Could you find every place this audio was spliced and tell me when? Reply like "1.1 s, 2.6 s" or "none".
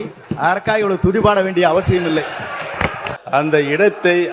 3.1 s